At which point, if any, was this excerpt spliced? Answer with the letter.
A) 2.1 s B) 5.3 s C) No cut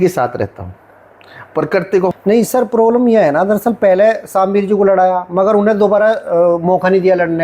A